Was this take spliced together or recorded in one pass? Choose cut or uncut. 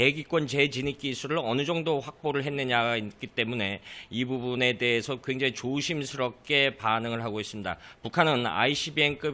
uncut